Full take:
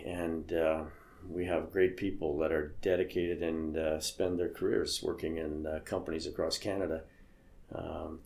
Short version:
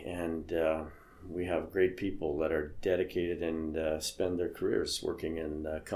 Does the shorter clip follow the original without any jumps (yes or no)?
yes